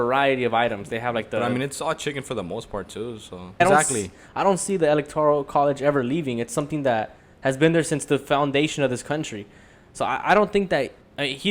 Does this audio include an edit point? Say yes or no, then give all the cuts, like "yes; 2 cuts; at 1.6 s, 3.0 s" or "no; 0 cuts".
yes; 1 cut; at 3.6 s